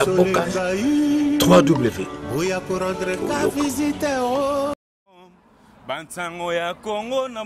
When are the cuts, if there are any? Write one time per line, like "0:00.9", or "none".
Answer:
0:05.0